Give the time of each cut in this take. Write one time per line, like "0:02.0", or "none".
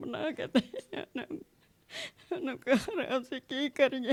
none